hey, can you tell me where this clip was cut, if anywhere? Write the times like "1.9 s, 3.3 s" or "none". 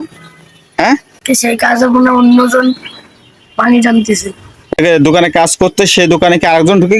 1.1 s, 4.8 s